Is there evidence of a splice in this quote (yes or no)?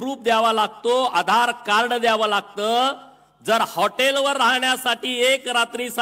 no